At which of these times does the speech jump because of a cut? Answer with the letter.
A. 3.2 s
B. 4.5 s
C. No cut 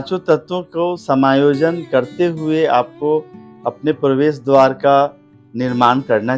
C